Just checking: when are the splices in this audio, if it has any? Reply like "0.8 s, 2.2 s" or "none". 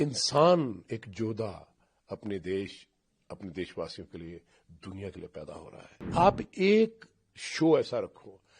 6.1 s